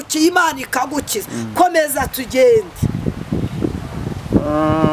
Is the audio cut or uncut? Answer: uncut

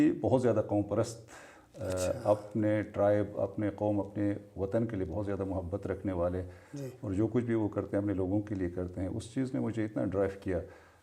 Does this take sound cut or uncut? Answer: uncut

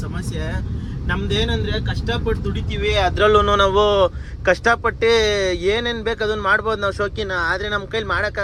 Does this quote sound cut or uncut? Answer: uncut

